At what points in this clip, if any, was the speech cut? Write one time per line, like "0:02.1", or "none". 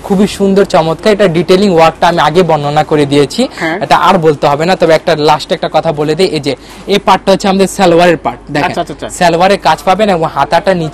none